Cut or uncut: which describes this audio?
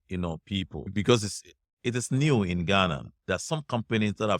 cut